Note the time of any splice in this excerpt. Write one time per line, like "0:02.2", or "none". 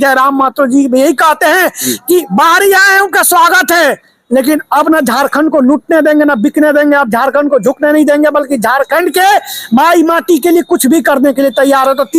none